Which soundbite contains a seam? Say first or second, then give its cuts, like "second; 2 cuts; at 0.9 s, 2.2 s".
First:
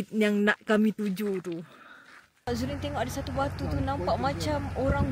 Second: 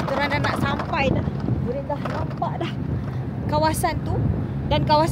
first; 1 cut; at 2.5 s